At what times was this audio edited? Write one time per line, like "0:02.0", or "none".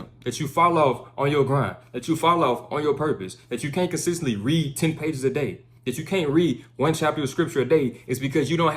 none